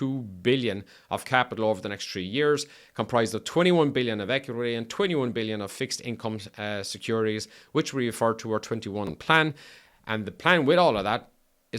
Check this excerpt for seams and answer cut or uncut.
cut